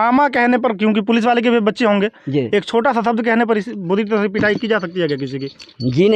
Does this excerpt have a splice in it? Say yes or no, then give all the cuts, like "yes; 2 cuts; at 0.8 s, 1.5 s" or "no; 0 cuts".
no; 0 cuts